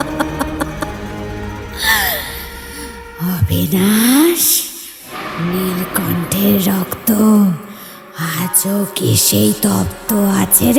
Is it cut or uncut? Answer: uncut